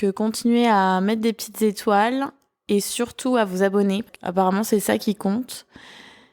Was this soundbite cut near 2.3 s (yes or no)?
no